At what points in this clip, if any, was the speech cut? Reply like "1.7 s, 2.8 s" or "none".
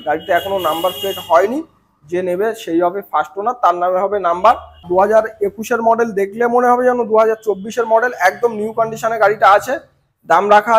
4.8 s